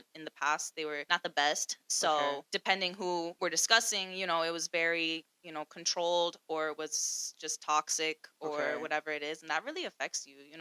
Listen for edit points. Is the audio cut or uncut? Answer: cut